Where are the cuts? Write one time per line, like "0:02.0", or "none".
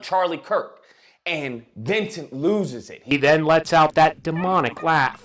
0:02.9